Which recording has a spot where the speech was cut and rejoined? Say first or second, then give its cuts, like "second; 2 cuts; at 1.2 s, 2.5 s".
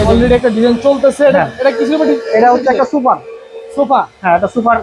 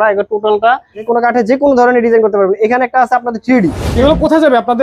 second; 2 cuts; at 1.0 s, 3.9 s